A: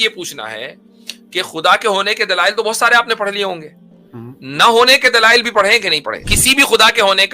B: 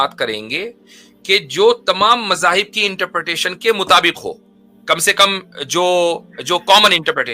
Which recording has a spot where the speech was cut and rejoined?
A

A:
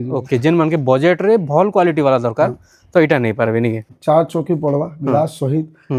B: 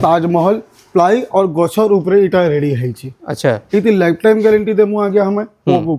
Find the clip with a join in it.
A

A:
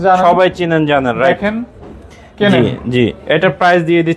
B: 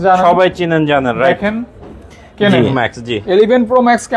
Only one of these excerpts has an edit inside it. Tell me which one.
B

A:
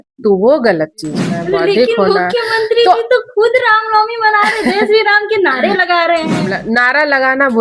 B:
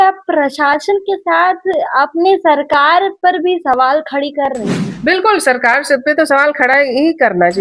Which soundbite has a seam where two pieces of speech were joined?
A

